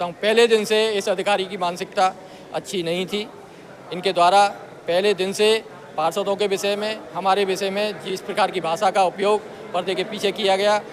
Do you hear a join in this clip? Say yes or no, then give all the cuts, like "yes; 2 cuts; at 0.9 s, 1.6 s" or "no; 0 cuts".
no; 0 cuts